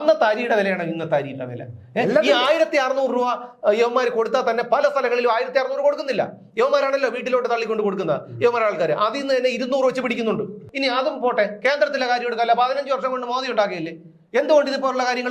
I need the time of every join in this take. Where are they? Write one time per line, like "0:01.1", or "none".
0:10.6